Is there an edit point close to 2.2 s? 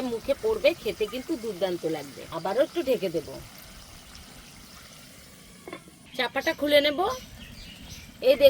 yes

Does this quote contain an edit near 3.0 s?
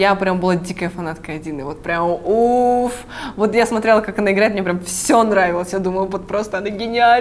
no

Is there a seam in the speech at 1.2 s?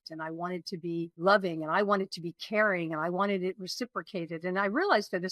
yes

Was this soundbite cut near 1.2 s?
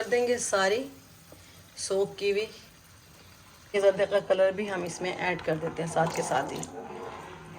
no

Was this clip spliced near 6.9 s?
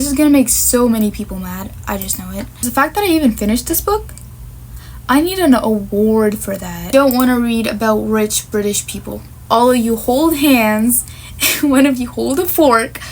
yes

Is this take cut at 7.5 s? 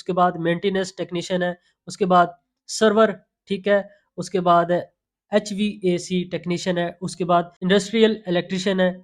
yes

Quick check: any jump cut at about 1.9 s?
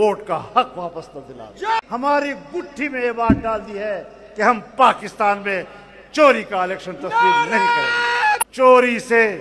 yes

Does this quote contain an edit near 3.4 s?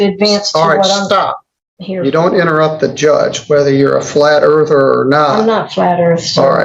no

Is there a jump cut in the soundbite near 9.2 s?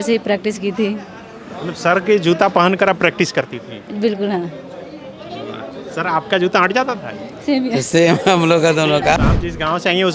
yes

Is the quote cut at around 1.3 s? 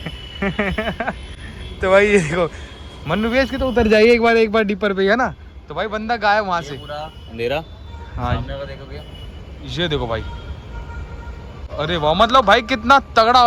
no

